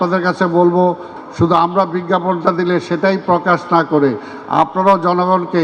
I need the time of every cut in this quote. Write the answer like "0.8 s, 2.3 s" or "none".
1.2 s